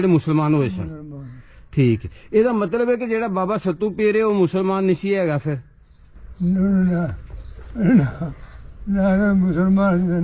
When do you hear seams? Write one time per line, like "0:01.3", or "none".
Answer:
none